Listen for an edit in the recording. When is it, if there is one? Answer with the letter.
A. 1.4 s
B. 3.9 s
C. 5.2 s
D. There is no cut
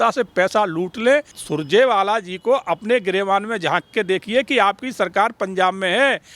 A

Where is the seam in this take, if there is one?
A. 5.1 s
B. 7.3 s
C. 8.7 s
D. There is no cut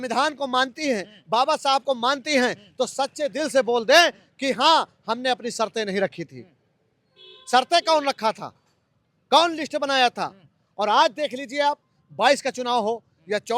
D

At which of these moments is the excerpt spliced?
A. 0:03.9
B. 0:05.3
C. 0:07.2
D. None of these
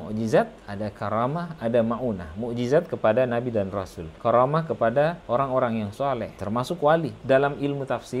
C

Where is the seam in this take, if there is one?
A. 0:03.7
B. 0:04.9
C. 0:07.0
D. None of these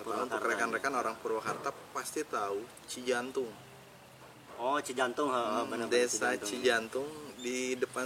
D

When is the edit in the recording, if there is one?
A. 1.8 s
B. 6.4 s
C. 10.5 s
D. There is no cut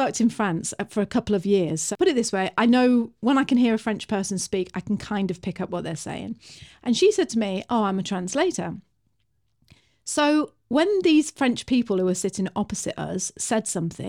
A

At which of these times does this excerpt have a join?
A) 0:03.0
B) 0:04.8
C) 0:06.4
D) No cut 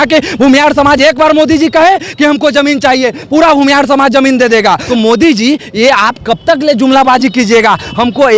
B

